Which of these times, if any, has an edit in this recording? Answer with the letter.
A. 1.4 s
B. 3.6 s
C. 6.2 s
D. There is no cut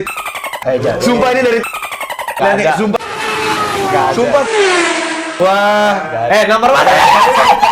C